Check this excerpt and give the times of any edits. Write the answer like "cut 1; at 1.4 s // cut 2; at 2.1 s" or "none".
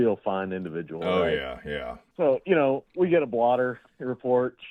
none